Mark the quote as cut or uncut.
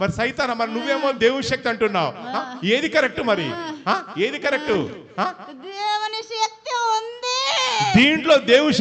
uncut